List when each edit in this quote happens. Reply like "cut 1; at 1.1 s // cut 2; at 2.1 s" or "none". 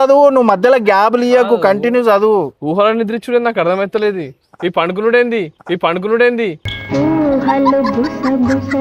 none